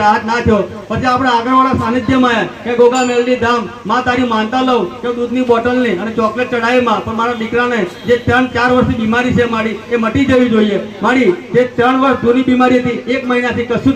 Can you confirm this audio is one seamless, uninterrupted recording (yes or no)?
yes